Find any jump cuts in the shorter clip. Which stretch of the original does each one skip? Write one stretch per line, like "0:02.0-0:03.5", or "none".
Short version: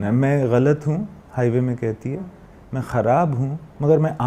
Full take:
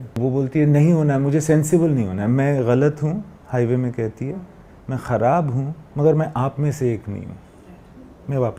none

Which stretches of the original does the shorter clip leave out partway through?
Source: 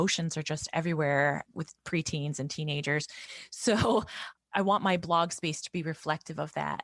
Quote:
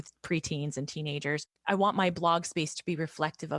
0:03.1-0:04.4

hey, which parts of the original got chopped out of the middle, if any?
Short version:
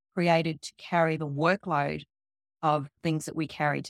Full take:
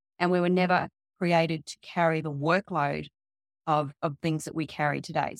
0:04.0-0:04.1

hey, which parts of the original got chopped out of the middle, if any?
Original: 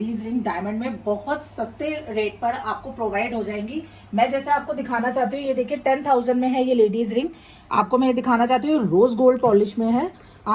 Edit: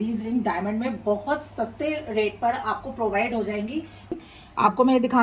0:04.1-0:07.3

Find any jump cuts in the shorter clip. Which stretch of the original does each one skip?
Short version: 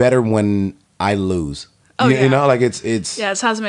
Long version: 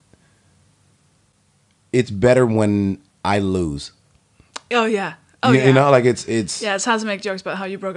0:04.0-0:05.2

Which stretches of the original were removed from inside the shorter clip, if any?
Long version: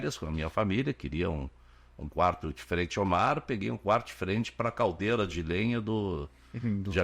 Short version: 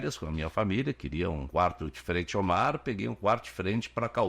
0:01.4-0:02.1

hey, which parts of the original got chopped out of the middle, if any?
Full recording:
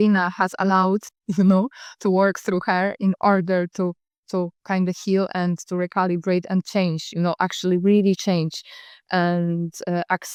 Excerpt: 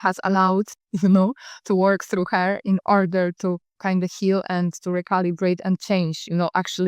0:04.1-0:04.6

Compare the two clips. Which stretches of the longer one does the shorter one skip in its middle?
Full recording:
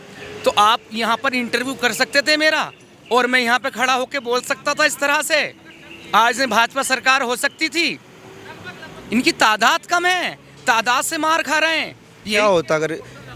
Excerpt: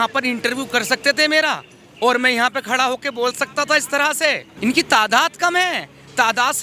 0:05.6-0:09.0

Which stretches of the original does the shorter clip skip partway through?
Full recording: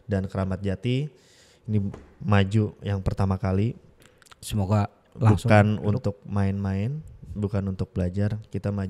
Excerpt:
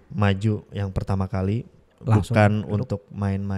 0:04.0-0:05.0

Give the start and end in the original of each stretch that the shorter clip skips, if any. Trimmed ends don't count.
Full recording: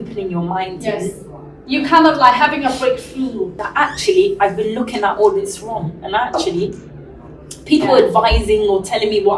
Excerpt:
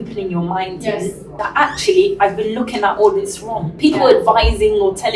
0:01.4-0:03.6
0:05.9-0:07.5

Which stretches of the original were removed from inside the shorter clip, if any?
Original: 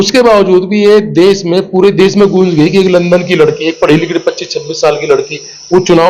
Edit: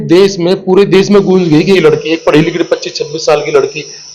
0:02.8-0:03.3

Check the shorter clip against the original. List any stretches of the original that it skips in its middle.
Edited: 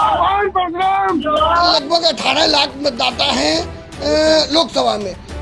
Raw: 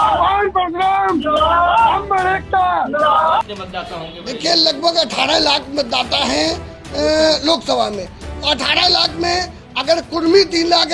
0:01.7-0:04.6

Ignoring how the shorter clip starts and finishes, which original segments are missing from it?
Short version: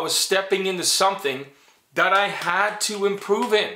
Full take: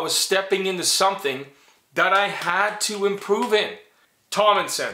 none

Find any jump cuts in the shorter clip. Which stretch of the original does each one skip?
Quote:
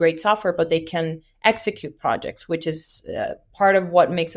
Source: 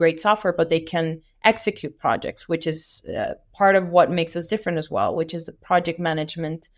none

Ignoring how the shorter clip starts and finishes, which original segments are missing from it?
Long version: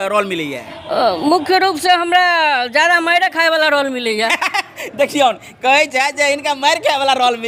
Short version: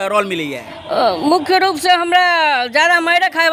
none

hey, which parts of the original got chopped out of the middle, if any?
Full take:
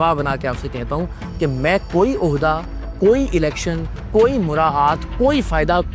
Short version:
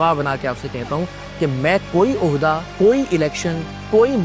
0:02.7-0:02.9

